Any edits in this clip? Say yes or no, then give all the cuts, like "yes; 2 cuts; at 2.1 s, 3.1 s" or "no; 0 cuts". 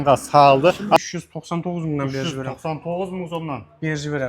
yes; 1 cut; at 1.0 s